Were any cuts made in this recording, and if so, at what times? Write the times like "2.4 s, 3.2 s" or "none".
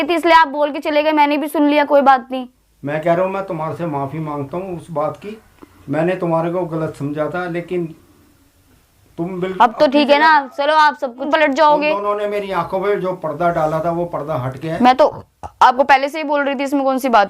11.2 s

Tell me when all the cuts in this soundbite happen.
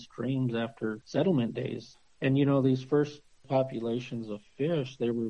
1.0 s, 1.9 s, 3.4 s

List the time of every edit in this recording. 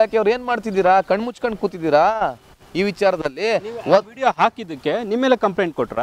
none

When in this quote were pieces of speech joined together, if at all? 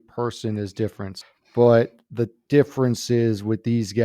1.1 s

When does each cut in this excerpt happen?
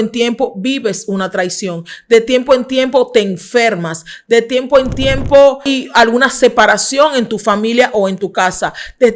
5.7 s

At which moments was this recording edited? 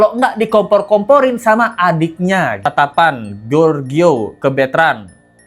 2.7 s

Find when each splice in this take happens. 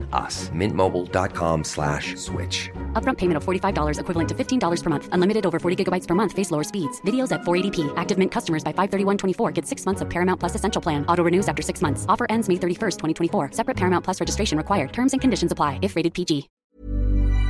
16.5 s

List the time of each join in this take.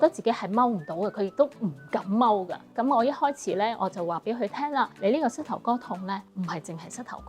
2.7 s, 4.9 s, 6.3 s

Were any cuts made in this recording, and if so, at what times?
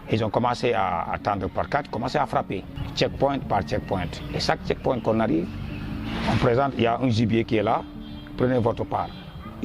2.8 s

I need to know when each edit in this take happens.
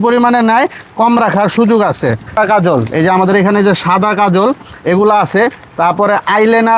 2.4 s

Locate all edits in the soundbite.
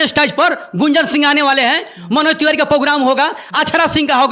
none

